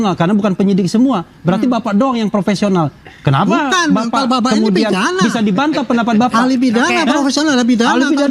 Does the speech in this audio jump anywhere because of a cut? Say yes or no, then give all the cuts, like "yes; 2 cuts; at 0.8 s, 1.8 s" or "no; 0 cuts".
no; 0 cuts